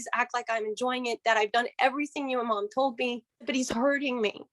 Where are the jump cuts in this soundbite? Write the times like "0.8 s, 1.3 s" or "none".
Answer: 3.5 s